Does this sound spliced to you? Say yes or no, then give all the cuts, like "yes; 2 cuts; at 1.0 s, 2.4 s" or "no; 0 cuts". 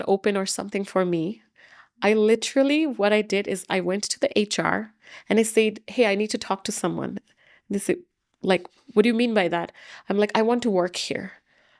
no; 0 cuts